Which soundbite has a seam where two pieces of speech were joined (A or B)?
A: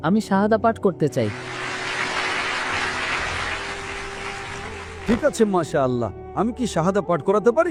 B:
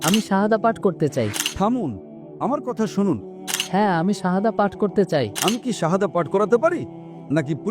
B